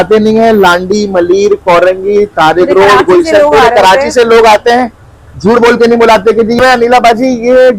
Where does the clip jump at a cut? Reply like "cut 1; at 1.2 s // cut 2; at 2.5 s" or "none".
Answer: cut 1; at 6.6 s